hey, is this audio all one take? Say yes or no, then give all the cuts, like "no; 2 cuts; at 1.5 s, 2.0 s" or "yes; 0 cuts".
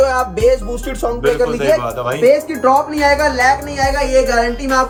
yes; 0 cuts